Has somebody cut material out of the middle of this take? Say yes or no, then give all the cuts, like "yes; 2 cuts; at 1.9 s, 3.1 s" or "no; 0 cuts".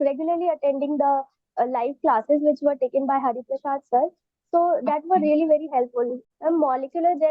yes; 1 cut; at 6.2 s